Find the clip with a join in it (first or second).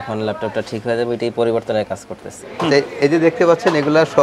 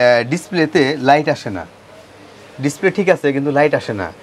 first